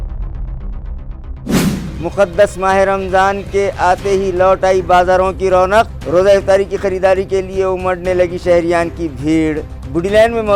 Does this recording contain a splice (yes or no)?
no